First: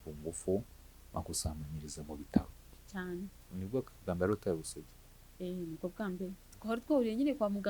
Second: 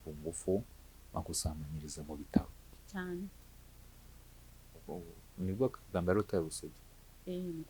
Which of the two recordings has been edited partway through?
first; 2 cuts; at 3.4 s, 6.5 s

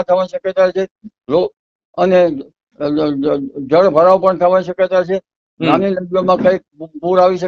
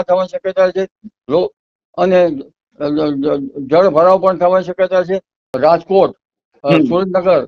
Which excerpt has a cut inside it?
second; 1 cut; at 5.5 s

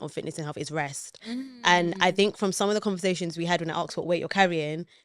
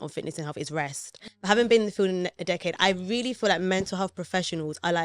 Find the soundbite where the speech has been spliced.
second; 1 cut; at 1.2 s

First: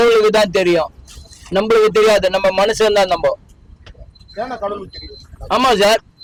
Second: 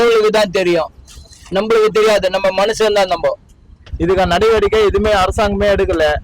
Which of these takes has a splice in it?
second; 1 cut; at 3.9 s

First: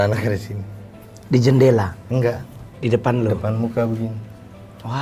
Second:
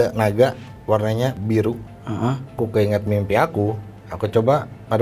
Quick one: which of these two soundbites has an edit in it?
second; 1 cut; at 2.5 s

